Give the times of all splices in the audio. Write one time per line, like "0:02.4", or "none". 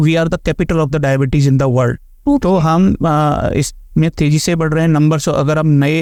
none